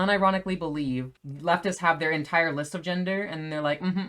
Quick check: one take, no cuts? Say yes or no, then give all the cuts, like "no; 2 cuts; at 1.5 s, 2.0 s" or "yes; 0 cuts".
no; 1 cut; at 1.1 s